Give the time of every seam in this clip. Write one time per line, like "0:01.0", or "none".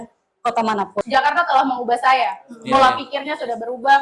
0:01.0